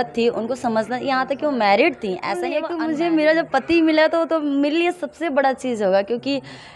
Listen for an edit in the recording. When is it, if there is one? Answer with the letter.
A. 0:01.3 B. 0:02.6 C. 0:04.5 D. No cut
B